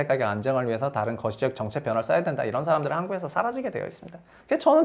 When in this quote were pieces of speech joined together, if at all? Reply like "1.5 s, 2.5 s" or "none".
none

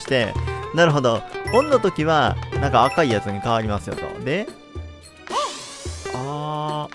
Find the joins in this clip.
none

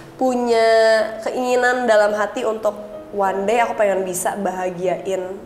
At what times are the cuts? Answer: none

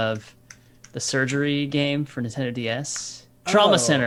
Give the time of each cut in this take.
none

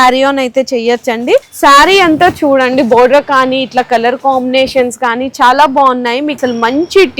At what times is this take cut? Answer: 1.5 s, 6.4 s

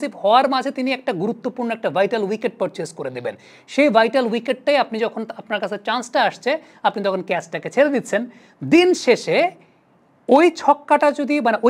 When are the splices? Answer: none

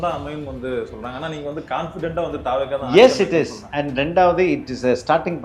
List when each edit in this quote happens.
none

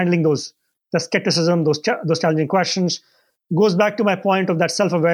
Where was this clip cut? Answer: none

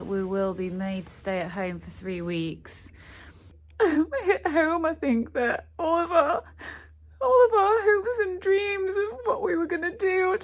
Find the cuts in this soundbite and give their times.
3.6 s

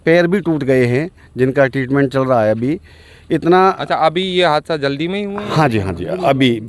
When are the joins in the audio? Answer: none

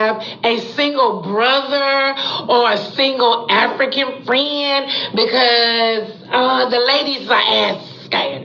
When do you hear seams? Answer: none

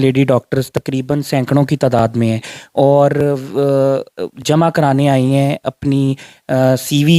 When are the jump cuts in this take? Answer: none

